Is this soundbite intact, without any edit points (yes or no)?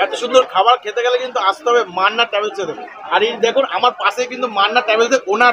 yes